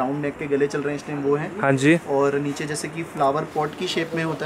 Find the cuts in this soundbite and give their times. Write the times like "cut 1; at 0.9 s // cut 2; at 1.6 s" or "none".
none